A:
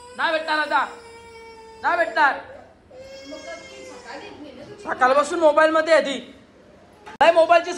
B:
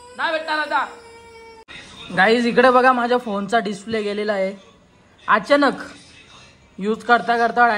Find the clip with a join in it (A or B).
B